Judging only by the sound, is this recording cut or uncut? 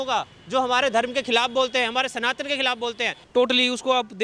cut